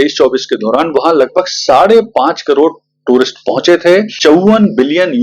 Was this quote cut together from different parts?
yes; 1 cut; at 4.1 s

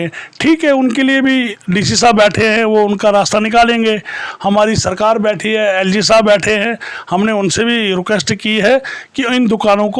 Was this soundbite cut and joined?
no; 0 cuts

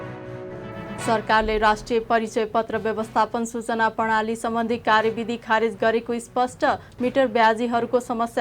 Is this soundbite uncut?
no; 1 cut; at 1.1 s

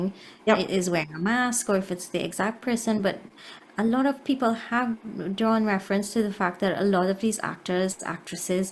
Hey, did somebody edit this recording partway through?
no; 0 cuts

